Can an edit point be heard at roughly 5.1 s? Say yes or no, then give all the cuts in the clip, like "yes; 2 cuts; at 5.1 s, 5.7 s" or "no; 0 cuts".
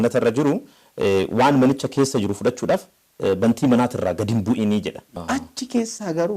yes; 1 cut; at 5.1 s